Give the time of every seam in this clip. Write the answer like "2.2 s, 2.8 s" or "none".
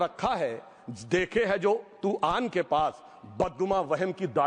none